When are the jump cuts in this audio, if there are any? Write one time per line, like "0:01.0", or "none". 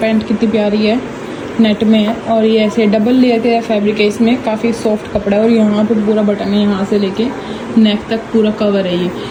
none